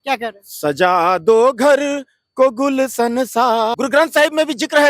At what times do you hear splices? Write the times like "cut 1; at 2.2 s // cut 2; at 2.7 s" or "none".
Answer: cut 1; at 3.7 s